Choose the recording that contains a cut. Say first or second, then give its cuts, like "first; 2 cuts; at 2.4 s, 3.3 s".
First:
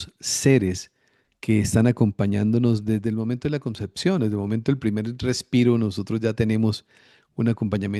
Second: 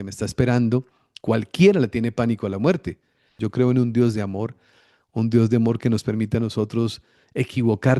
second; 1 cut; at 3.4 s